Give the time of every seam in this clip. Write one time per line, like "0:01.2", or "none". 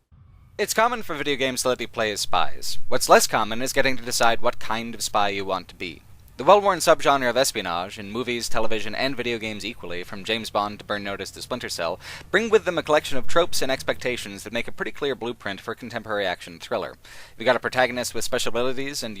0:03.9